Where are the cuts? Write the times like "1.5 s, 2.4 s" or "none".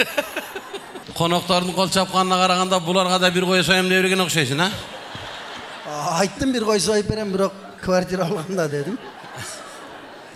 1.0 s

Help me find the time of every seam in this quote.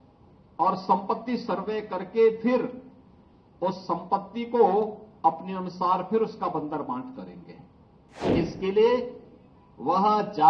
8.3 s

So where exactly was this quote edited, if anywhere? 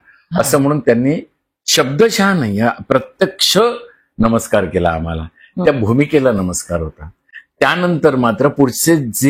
none

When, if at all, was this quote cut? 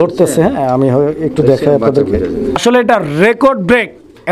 2.6 s

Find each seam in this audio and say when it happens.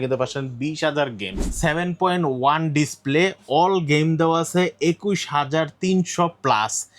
1.5 s

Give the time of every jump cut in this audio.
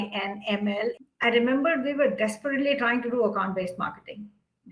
0.9 s

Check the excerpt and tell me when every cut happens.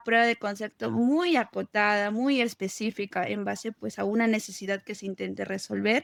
none

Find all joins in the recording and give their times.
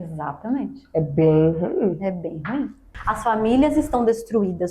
2.9 s

